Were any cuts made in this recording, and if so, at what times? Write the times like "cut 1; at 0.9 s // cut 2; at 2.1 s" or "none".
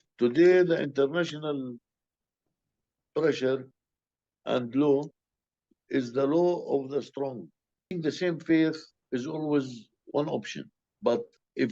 cut 1; at 7.9 s // cut 2; at 8.9 s